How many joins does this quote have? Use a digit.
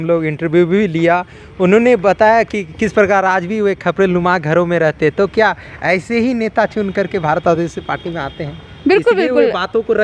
0